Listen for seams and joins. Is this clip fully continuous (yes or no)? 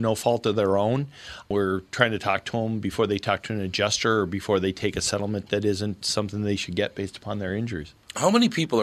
yes